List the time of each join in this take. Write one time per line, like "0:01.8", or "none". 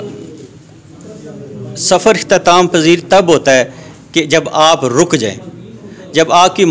none